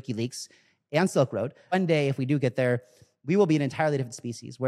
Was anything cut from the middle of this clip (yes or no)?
yes